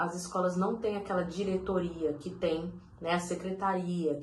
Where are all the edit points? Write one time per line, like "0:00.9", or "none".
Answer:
none